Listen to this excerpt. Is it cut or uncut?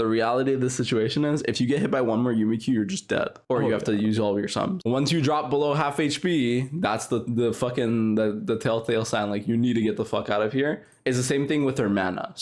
cut